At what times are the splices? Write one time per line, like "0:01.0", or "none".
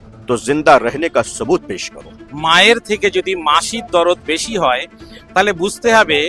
0:02.3